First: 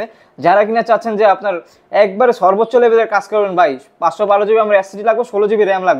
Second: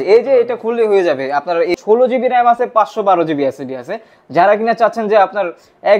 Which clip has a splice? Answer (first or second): second